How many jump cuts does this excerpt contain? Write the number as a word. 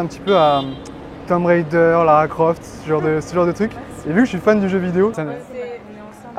one